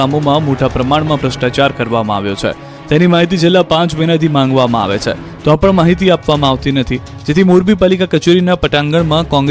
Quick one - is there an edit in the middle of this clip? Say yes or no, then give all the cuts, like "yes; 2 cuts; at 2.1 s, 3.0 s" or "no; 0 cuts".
yes; 1 cut; at 2.3 s